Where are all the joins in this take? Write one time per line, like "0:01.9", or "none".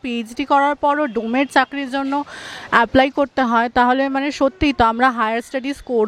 none